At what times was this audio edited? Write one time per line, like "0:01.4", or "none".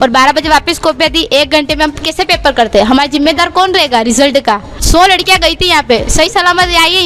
0:04.8